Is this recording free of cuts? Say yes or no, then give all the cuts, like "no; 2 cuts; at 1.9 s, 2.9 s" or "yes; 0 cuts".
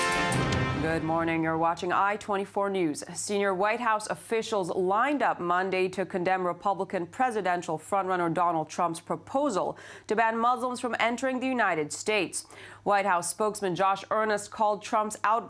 yes; 0 cuts